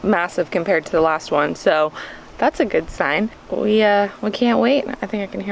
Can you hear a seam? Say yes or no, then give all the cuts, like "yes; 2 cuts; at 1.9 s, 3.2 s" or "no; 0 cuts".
yes; 1 cut; at 3.4 s